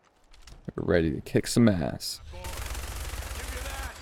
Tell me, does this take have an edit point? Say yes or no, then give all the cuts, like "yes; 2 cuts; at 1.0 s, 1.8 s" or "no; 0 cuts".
yes; 1 cut; at 2.2 s